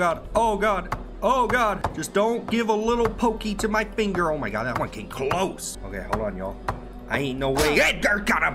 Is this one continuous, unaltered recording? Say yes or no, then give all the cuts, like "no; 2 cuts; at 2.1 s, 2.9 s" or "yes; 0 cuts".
no; 2 cuts; at 1.9 s, 5.7 s